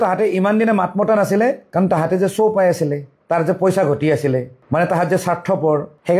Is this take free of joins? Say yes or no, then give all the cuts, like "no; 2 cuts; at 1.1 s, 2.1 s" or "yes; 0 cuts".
yes; 0 cuts